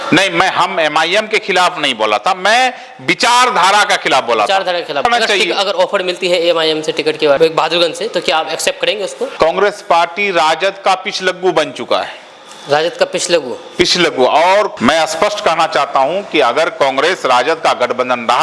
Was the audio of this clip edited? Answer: yes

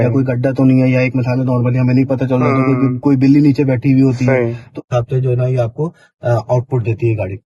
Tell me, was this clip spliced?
yes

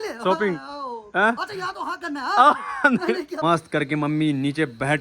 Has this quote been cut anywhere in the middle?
yes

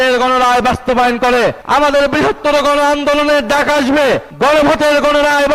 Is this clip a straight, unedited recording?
no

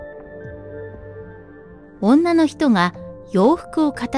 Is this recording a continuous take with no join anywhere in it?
yes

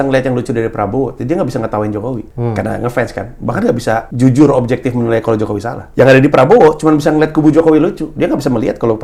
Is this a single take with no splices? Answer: no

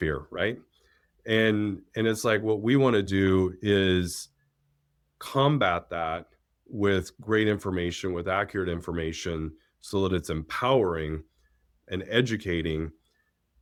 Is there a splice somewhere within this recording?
no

